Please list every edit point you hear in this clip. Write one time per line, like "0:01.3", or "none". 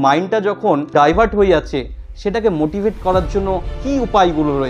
0:00.9
0:03.7

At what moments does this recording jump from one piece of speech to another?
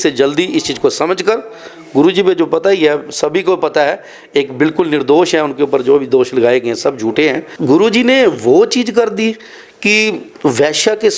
0:07.5

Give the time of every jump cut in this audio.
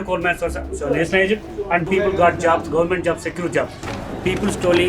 0:03.8

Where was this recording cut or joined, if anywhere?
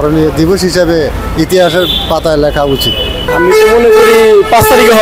none

